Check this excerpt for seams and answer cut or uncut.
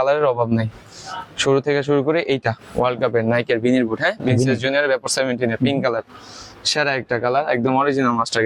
uncut